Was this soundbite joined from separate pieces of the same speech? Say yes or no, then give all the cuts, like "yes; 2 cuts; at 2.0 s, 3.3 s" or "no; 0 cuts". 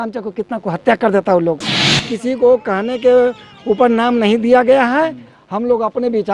yes; 1 cut; at 2.0 s